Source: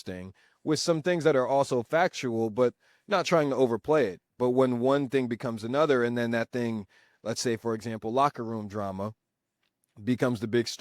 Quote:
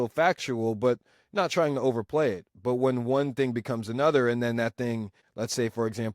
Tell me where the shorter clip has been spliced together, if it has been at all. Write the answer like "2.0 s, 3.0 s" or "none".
5.2 s